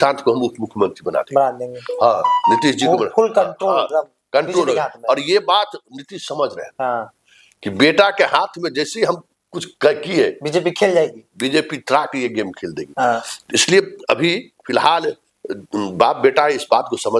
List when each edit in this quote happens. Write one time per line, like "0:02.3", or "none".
none